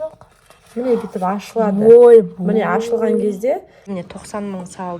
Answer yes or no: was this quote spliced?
yes